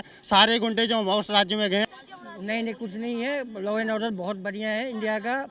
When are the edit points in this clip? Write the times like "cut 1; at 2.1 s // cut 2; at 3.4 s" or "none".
cut 1; at 2.0 s